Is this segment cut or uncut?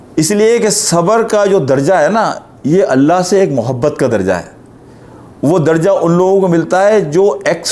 uncut